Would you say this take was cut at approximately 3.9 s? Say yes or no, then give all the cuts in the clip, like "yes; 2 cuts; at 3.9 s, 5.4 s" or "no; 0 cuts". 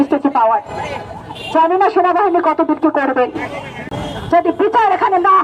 yes; 1 cut; at 3.9 s